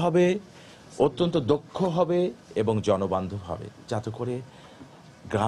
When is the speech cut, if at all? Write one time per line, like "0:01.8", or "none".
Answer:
none

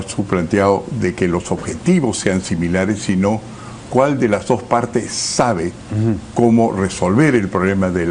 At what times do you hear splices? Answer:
none

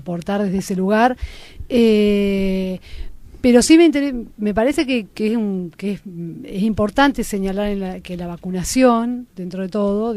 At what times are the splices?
0:03.9

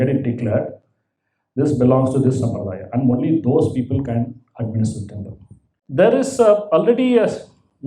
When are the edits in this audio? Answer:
0:05.8

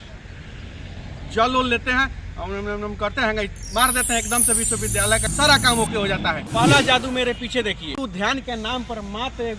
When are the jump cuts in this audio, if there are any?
0:05.3
0:06.4
0:08.0

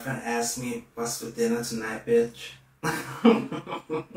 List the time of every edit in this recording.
none

